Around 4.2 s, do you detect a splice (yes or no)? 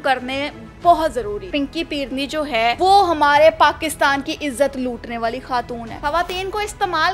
no